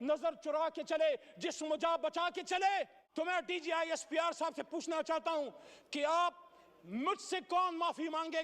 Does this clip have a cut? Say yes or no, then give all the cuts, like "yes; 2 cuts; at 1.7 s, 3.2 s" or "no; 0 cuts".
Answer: yes; 1 cut; at 3.0 s